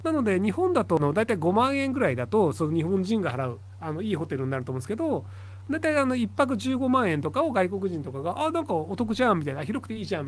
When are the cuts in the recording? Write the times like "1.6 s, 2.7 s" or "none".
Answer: 1.0 s